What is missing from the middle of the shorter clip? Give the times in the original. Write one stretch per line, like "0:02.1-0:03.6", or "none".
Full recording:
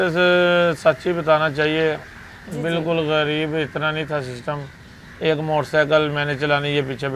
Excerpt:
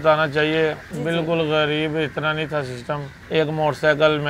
0:02.1-0:02.5
0:04.7-0:05.0